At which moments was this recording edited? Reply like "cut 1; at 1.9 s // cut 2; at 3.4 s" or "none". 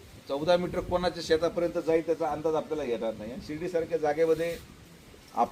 none